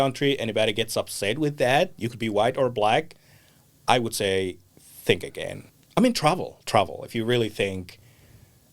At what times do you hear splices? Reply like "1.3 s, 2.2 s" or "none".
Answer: 5.7 s